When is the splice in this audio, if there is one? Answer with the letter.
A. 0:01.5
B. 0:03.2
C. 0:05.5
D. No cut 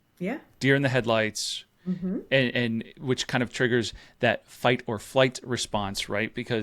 D